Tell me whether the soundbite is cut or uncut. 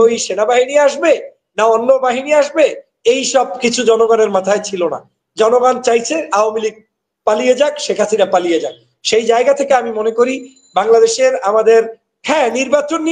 uncut